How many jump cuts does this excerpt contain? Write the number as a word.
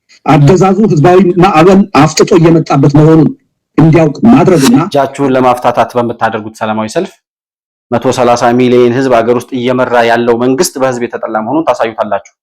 one